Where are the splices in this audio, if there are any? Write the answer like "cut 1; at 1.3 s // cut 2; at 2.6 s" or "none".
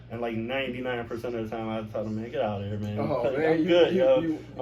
none